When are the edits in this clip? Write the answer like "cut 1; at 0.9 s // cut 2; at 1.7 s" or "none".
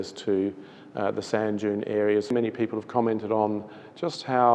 cut 1; at 2.3 s